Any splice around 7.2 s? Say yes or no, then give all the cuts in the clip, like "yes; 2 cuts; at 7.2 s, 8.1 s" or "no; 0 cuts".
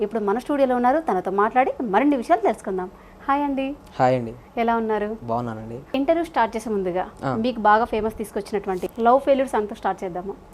no; 1 cut; at 5.9 s